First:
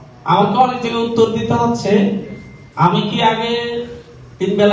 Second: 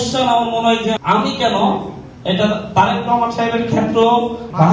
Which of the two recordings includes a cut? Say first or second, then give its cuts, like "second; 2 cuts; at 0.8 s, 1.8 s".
second; 1 cut; at 1.0 s